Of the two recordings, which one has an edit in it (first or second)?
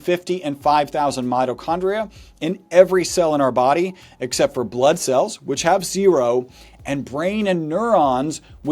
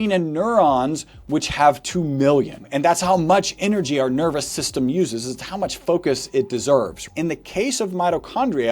second